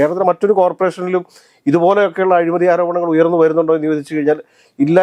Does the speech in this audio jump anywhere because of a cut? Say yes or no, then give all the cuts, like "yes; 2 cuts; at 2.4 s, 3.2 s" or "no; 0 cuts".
no; 0 cuts